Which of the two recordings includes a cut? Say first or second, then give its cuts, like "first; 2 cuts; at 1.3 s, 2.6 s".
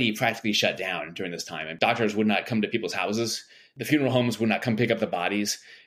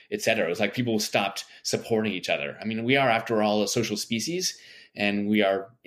first; 1 cut; at 1.8 s